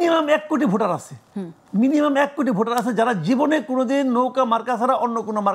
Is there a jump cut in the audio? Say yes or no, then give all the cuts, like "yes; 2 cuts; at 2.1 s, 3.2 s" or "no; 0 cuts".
no; 0 cuts